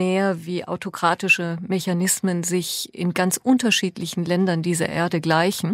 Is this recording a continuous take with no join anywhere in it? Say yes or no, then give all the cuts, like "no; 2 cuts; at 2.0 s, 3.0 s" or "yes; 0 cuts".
yes; 0 cuts